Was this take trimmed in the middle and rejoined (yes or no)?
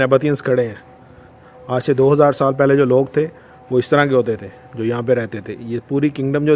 no